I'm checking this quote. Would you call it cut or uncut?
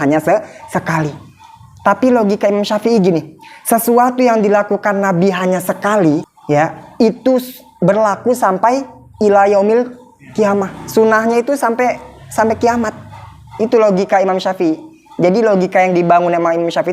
cut